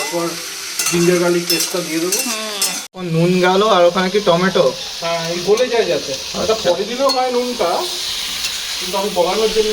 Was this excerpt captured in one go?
no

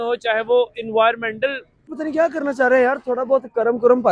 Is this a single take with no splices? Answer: no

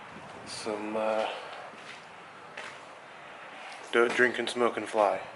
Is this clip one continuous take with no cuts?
no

